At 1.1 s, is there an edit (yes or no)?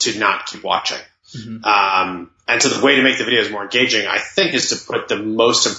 no